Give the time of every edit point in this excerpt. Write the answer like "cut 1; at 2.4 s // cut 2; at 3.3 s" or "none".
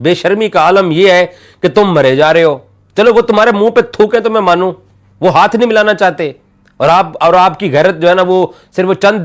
none